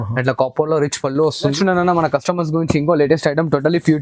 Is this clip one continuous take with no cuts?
no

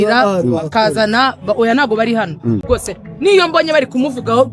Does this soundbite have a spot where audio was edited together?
yes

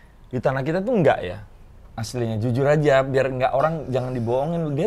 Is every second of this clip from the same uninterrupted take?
yes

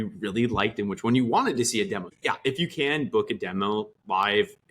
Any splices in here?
yes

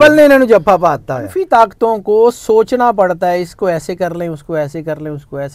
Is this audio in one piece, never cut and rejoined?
no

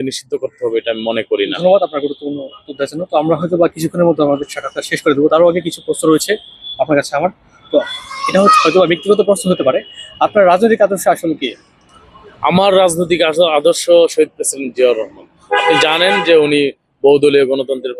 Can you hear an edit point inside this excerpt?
no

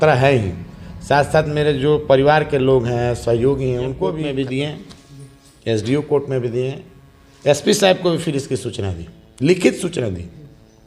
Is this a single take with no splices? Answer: no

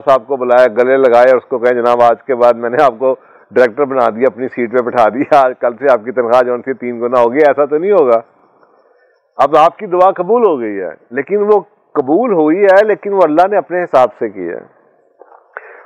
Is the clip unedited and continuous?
yes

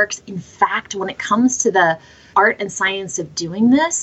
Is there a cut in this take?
yes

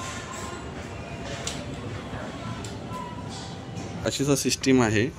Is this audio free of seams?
no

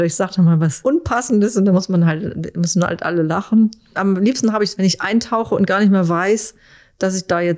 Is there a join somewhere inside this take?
no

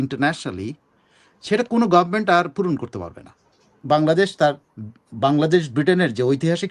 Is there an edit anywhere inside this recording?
yes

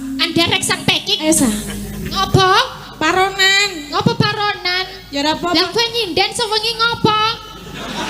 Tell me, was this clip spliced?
yes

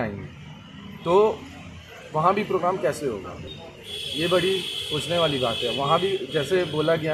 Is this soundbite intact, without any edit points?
yes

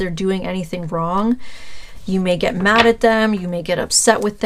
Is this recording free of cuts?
yes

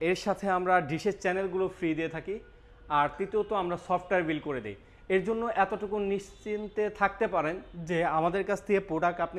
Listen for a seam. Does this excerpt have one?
no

